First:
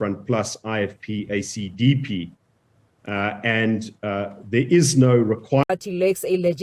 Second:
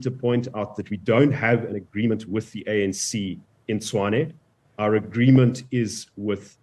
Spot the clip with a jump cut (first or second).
first